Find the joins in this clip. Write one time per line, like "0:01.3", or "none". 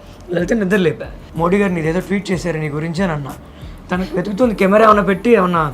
0:01.2
0:03.7